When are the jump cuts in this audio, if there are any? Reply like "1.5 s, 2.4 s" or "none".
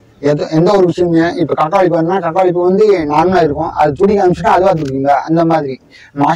none